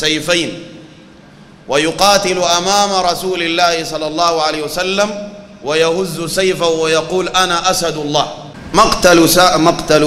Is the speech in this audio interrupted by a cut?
no; 0 cuts

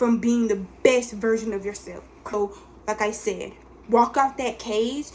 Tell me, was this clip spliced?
yes; 1 cut; at 2.3 s

